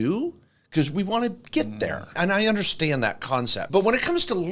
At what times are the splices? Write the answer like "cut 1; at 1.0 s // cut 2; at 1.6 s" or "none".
cut 1; at 2.2 s // cut 2; at 3.6 s